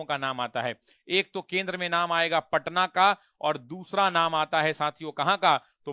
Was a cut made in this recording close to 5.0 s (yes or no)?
no